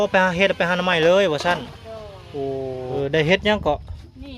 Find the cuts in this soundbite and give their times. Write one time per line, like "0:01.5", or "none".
0:02.9